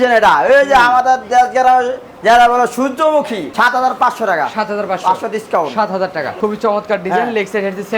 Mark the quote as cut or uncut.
cut